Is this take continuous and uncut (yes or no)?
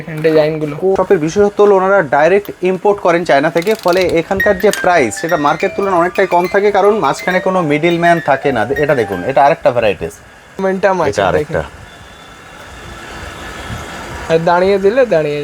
no